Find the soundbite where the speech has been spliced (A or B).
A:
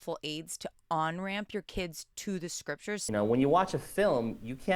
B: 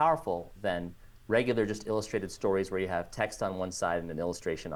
A